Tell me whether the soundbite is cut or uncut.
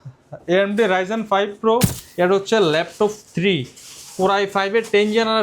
cut